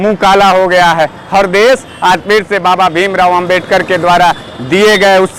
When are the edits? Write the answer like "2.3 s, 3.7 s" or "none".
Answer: none